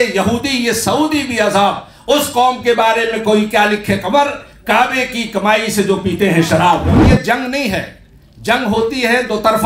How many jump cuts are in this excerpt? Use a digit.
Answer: 1